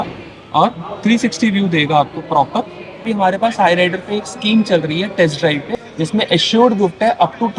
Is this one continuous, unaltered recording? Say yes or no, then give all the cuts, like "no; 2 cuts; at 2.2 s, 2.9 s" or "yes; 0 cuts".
no; 2 cuts; at 3.0 s, 5.8 s